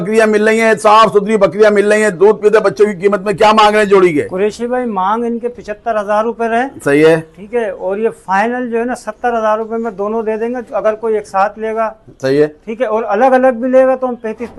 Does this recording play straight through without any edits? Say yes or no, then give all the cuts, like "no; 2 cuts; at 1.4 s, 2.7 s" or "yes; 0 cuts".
yes; 0 cuts